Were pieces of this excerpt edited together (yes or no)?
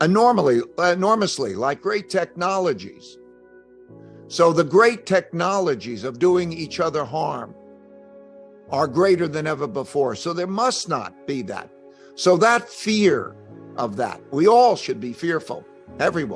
no